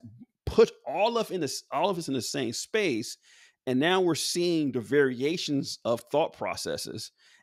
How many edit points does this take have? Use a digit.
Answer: 0